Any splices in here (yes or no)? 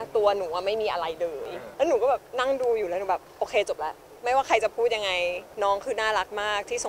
yes